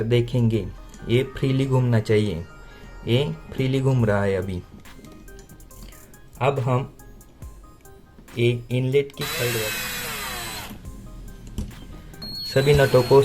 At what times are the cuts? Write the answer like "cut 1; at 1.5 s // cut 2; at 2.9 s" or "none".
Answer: cut 1; at 9.6 s